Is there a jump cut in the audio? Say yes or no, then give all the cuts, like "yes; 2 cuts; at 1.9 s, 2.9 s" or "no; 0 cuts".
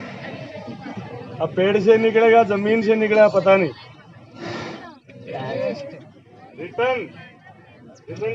yes; 1 cut; at 4.8 s